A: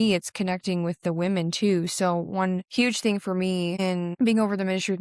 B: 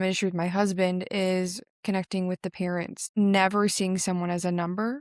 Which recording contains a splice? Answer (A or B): A